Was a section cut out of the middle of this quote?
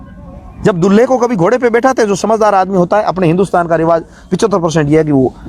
no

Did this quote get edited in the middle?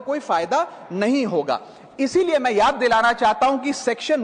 no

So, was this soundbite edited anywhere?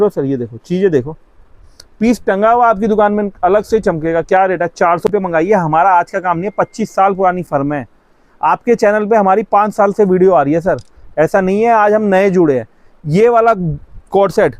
yes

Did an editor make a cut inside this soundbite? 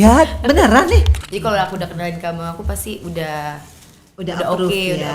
yes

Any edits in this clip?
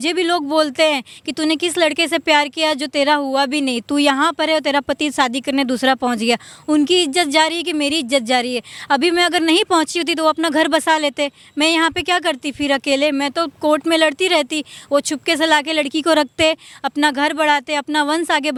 no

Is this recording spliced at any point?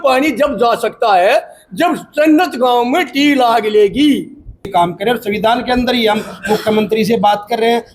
yes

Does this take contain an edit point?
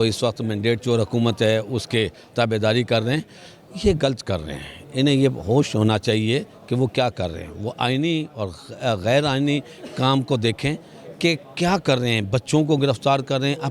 no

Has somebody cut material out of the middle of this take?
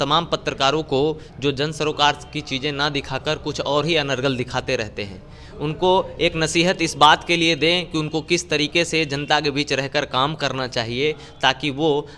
no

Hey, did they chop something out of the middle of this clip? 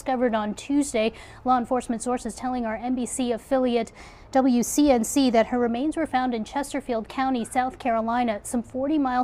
no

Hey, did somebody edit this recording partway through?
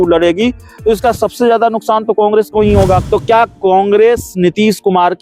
yes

